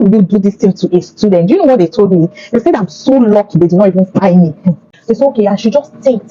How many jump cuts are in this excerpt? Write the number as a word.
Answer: one